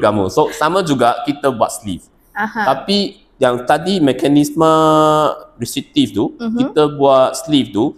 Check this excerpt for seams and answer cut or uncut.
uncut